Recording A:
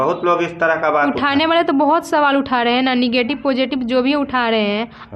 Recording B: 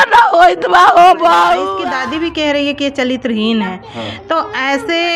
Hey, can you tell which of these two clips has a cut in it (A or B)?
B